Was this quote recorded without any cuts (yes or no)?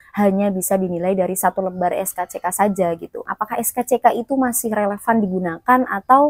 no